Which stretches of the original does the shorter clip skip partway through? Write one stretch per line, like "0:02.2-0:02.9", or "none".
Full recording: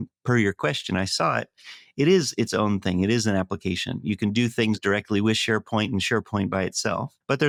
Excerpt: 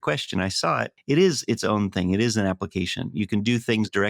0:01.5-0:01.8

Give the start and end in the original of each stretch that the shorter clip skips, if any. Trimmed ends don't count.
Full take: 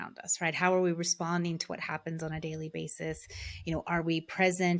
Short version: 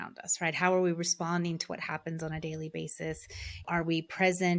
0:03.6-0:03.8

